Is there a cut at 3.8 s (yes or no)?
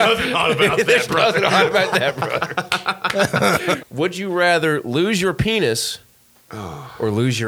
yes